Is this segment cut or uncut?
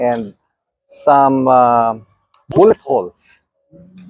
uncut